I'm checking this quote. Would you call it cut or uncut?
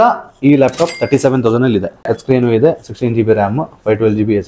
cut